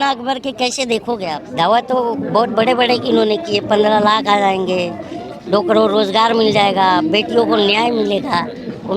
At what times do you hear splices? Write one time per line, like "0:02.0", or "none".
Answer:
0:01.4